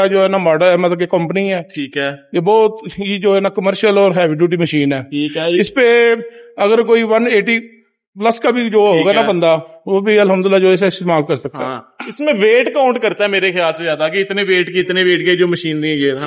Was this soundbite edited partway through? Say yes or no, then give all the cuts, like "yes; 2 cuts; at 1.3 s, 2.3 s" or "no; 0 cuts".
no; 0 cuts